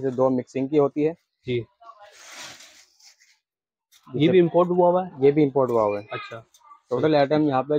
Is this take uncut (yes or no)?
yes